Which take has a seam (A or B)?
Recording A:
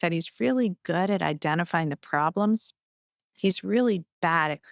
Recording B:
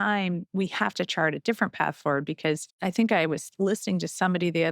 B